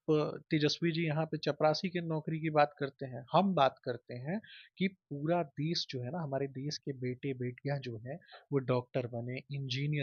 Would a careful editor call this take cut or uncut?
uncut